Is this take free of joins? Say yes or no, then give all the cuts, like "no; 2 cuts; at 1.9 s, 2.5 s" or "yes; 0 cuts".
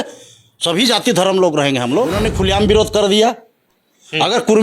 no; 1 cut; at 2.2 s